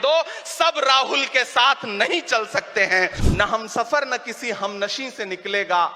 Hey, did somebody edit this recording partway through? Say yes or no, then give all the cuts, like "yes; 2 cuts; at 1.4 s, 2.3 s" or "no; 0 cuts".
yes; 1 cut; at 3.2 s